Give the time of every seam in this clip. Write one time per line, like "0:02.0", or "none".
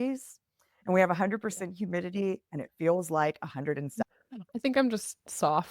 0:04.0